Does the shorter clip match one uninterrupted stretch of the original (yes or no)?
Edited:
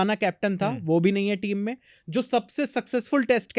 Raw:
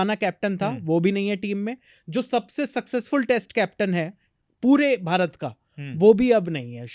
yes